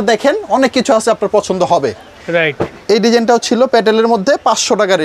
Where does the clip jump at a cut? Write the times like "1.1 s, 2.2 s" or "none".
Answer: none